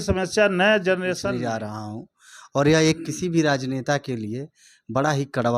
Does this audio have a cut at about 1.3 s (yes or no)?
yes